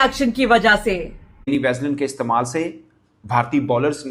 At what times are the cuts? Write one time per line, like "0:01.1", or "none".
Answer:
0:01.4